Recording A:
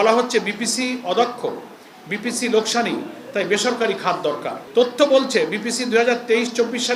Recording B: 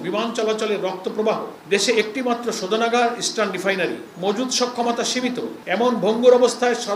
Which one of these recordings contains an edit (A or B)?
B